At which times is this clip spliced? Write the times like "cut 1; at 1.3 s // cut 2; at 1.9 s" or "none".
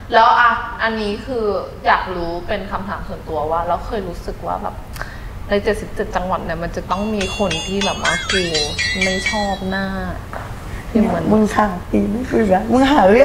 none